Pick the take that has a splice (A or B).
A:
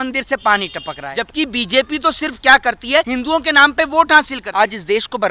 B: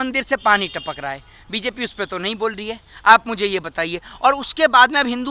A